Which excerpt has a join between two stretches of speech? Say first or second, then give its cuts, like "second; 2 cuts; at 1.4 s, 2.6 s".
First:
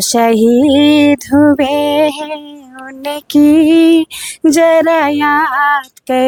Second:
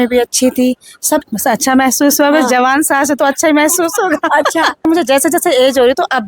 second; 2 cuts; at 1.2 s, 4.9 s